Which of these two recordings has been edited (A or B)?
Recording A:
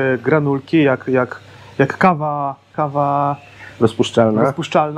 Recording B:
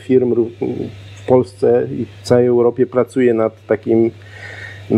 A